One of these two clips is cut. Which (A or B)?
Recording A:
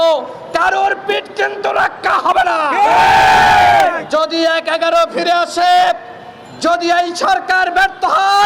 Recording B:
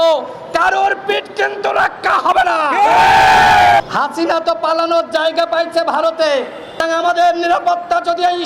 B